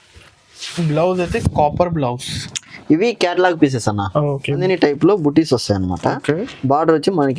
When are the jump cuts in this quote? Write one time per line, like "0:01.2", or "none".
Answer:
0:04.6